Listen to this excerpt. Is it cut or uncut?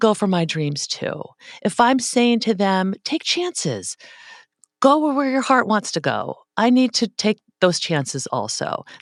uncut